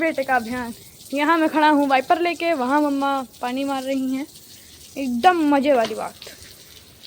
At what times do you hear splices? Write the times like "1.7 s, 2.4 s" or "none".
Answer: none